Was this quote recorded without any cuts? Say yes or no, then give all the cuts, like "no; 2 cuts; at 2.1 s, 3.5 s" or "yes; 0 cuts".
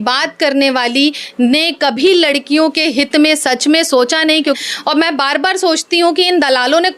no; 1 cut; at 4.6 s